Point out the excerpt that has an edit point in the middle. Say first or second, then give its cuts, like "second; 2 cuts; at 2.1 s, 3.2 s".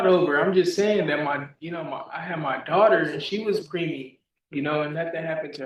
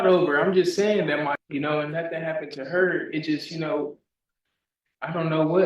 second; 1 cut; at 1.4 s